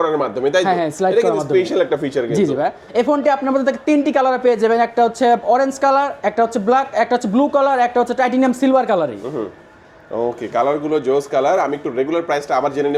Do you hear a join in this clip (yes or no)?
no